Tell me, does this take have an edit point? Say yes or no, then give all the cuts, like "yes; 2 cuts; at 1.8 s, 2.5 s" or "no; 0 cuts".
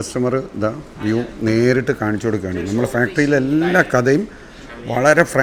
no; 0 cuts